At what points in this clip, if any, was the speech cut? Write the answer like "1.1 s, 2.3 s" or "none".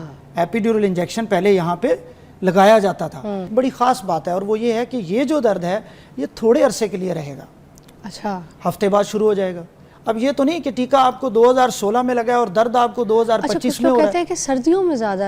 3.5 s